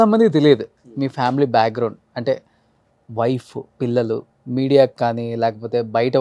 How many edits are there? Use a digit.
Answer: 1